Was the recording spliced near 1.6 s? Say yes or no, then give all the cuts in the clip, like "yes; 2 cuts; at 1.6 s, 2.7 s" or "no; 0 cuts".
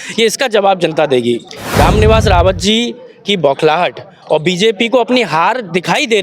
yes; 1 cut; at 1.6 s